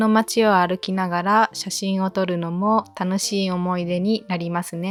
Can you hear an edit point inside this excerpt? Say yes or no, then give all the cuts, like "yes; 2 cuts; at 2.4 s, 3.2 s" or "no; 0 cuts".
no; 0 cuts